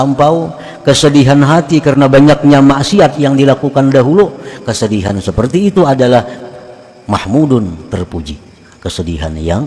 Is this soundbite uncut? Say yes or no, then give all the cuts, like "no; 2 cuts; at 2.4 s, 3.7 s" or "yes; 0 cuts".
yes; 0 cuts